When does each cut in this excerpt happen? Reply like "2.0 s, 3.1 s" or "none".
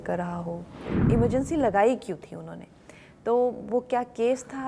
0.9 s

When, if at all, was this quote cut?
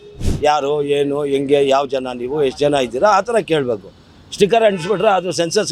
none

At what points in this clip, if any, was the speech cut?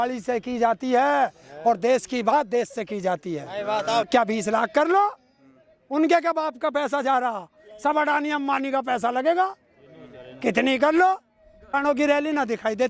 4.1 s, 11.7 s

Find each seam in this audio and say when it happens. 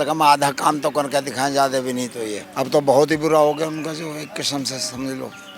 2.4 s

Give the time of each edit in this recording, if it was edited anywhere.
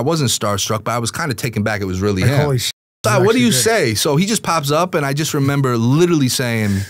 none

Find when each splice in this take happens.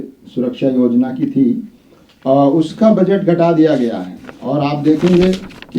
none

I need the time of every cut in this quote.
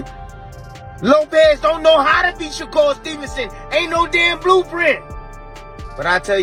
none

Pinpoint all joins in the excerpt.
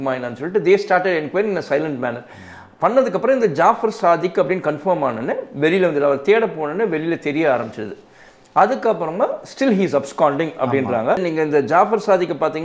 11.2 s

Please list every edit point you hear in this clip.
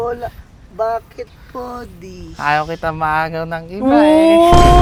none

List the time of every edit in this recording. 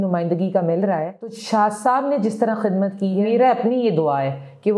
1.4 s, 3.2 s

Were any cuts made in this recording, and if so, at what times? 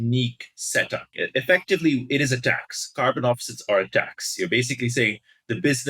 1.1 s

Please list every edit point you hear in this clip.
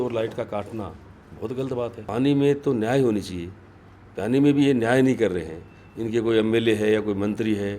2.0 s

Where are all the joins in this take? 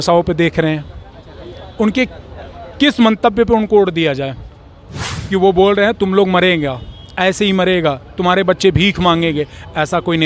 4.9 s

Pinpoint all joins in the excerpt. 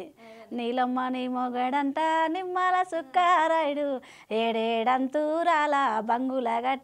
none

